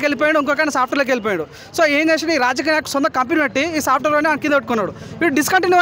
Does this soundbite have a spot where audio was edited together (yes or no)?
no